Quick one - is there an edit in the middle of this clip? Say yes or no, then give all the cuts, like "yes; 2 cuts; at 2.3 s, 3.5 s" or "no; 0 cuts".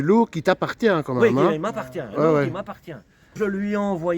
yes; 1 cut; at 3.3 s